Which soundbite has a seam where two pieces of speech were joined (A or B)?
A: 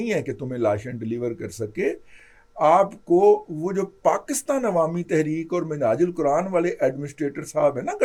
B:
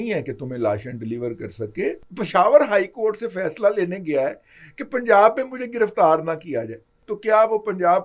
B